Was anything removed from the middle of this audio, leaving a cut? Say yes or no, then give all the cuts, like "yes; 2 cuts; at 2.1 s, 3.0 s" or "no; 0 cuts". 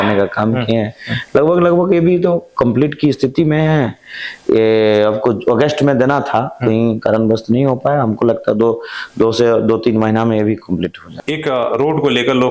yes; 1 cut; at 11.1 s